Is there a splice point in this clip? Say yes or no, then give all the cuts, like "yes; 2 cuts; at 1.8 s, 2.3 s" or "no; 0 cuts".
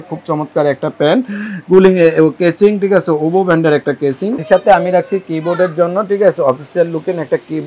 yes; 1 cut; at 4.4 s